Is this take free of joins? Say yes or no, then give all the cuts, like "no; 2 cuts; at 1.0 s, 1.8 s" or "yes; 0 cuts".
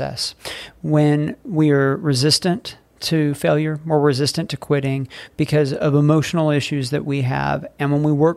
yes; 0 cuts